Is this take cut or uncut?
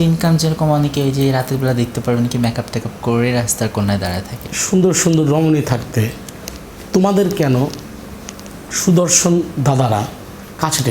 cut